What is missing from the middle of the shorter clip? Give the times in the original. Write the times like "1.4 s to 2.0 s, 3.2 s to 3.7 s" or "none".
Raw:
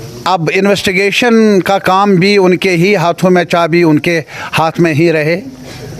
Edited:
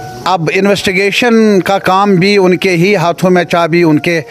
none